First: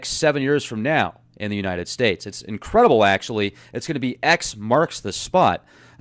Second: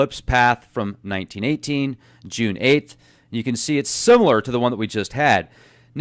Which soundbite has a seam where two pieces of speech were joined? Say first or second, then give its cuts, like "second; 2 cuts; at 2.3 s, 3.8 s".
first; 1 cut; at 3.2 s